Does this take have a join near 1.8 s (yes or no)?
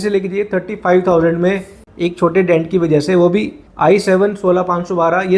no